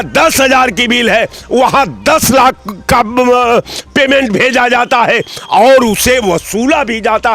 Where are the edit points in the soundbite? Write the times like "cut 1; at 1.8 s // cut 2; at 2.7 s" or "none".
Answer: none